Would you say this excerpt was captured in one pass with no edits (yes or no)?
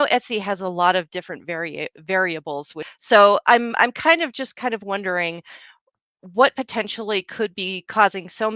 no